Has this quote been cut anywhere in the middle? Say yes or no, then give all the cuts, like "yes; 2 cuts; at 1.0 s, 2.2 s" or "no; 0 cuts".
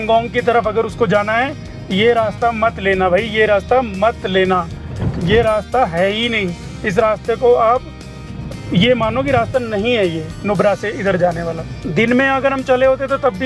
no; 0 cuts